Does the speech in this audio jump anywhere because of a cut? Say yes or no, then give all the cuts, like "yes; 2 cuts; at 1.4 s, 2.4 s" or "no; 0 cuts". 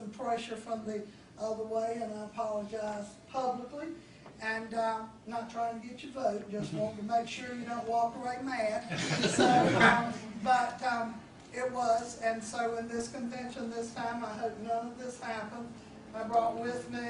yes; 1 cut; at 9.4 s